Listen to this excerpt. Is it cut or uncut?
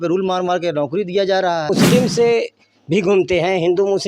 cut